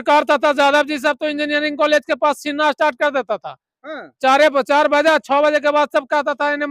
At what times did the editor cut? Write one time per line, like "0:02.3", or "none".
none